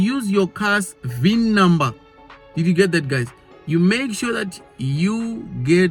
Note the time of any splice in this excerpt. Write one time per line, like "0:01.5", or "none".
none